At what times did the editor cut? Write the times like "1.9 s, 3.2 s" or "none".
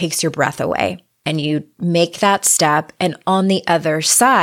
1.1 s